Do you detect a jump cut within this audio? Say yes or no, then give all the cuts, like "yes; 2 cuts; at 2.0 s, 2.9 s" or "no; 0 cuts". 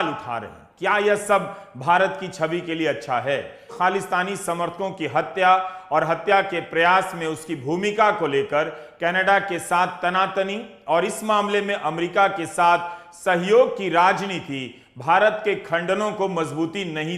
yes; 1 cut; at 3.8 s